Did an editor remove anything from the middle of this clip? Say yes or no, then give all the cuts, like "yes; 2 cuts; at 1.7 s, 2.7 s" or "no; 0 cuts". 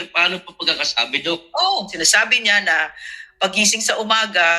yes; 1 cut; at 1.9 s